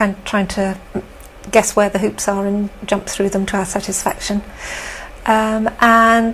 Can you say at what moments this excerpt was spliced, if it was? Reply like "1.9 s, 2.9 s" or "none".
none

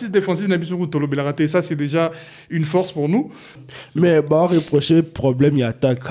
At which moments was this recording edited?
3.6 s

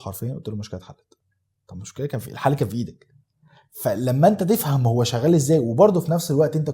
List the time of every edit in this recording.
none

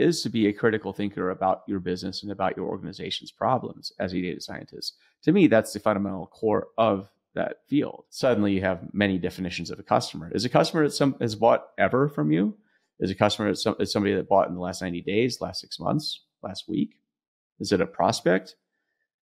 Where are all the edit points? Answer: 8.0 s

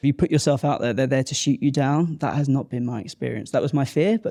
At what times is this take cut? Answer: none

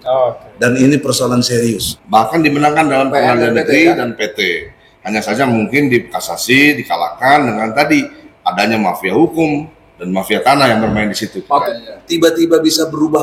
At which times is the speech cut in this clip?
1.9 s, 11.6 s

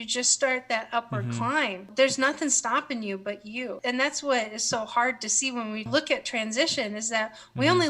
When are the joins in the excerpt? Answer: 1.9 s, 3.7 s, 5.9 s

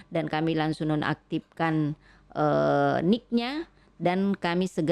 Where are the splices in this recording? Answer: none

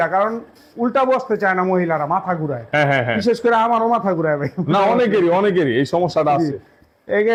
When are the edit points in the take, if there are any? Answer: none

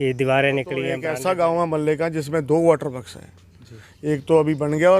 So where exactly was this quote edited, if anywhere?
1.0 s

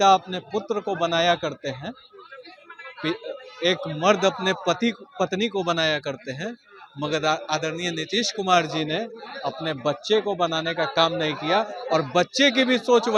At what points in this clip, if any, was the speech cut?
none

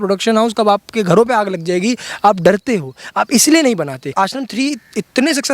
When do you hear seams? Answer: 4.1 s

